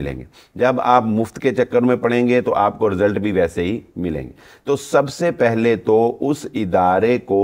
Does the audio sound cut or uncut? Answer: uncut